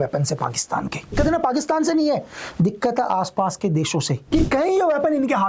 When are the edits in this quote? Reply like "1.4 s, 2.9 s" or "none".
1.1 s, 4.3 s